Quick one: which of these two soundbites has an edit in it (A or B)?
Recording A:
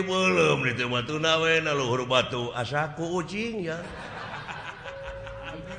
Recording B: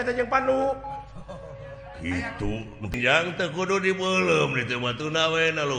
B